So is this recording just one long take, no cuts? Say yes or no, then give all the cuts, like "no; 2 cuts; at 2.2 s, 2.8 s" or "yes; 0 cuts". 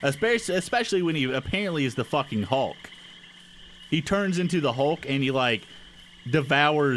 yes; 0 cuts